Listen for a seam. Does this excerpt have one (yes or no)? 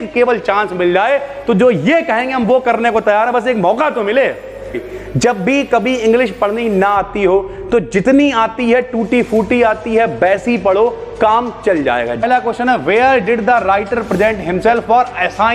yes